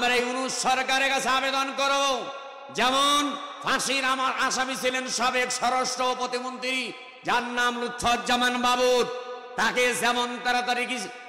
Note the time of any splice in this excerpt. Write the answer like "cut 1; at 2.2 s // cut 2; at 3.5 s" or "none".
none